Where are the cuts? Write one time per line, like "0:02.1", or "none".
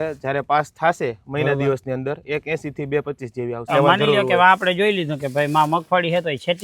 0:03.6